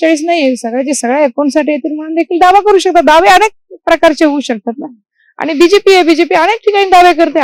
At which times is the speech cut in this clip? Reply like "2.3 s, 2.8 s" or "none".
none